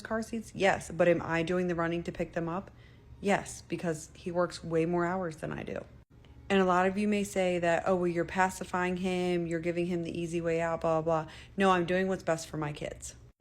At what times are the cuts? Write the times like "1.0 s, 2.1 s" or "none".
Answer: 1.4 s, 6.7 s